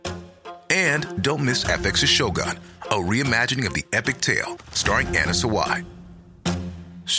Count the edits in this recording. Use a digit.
0